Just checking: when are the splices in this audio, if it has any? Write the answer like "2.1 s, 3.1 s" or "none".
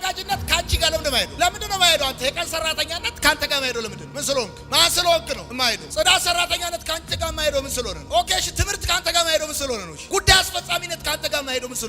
none